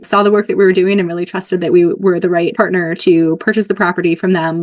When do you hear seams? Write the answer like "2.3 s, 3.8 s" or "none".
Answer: 2.5 s